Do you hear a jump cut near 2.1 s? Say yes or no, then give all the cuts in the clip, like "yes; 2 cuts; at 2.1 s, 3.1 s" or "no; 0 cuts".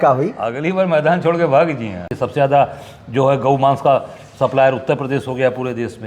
yes; 1 cut; at 2.1 s